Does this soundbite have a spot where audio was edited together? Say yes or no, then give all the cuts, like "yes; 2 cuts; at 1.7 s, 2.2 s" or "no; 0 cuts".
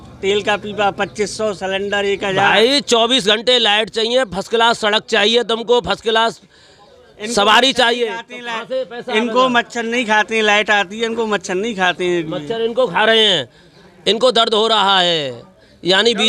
no; 0 cuts